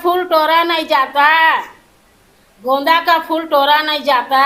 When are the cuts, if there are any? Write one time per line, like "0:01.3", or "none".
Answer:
none